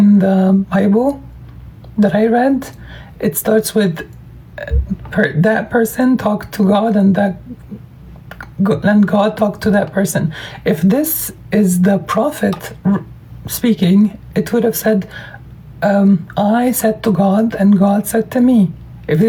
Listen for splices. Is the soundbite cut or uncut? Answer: uncut